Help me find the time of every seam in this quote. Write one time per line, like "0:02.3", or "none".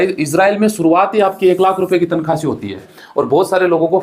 0:03.0